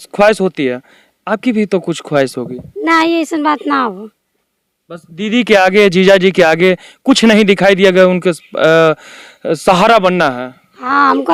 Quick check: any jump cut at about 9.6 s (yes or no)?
no